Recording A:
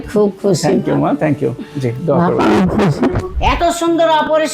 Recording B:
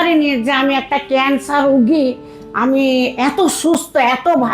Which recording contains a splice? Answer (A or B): A